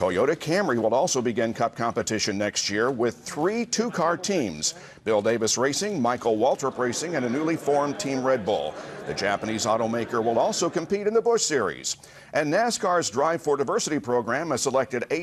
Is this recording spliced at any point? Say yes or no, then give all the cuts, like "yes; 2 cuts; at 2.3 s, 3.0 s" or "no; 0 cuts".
no; 0 cuts